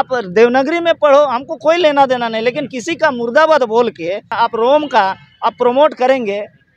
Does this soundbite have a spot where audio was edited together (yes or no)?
yes